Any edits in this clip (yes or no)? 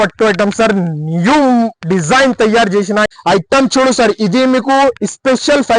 yes